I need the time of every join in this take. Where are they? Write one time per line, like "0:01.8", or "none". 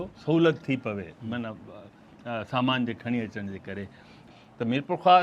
0:04.3

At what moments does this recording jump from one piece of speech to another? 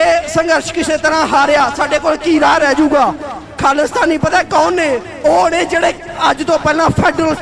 none

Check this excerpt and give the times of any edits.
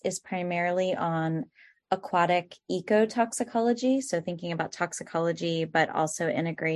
none

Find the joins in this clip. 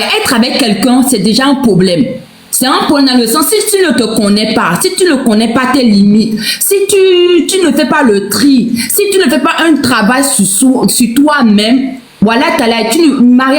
0:01.0

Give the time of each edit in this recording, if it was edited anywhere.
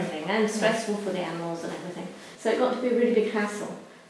0:02.3

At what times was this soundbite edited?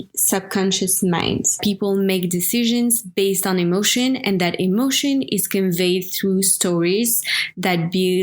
0:01.6

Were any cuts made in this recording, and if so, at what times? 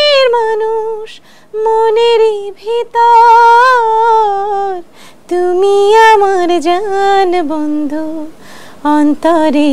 none

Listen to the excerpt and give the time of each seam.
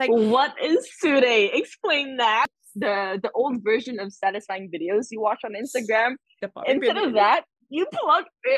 0:02.6

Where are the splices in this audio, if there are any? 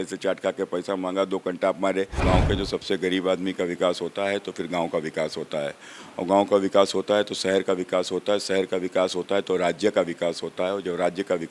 0:02.2

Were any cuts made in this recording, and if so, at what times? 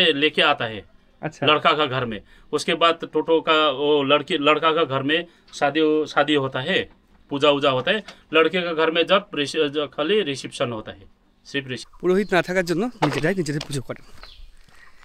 0:11.8

